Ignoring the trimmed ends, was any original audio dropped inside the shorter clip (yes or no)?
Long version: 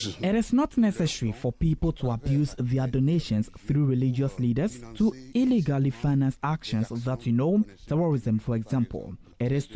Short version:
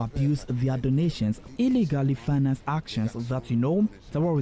yes